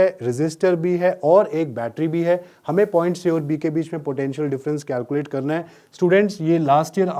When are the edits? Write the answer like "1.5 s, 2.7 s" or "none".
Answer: none